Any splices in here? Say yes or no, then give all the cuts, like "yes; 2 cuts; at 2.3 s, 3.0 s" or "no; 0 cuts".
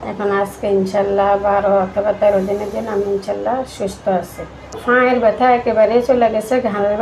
yes; 1 cut; at 4.7 s